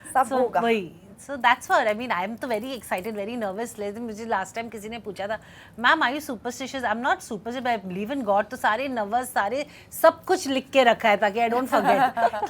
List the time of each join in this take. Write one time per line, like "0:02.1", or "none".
none

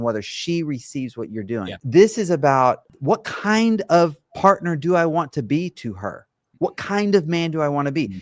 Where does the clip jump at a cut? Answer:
0:01.8
0:02.9

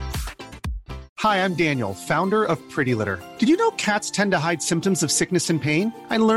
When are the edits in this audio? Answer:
0:01.1

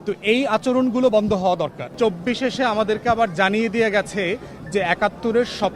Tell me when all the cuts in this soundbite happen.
0:01.9

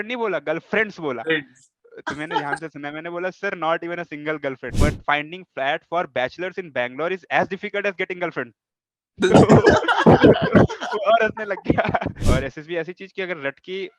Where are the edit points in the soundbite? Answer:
0:04.7
0:12.2

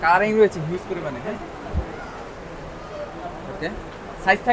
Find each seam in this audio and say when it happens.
none

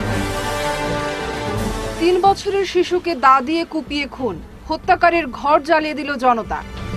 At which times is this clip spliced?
none

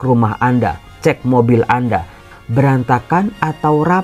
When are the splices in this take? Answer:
0:02.3

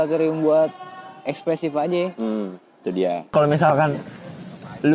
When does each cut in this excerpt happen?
0:03.3

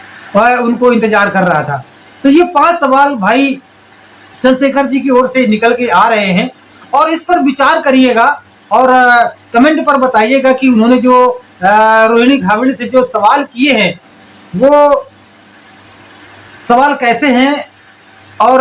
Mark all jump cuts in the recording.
none

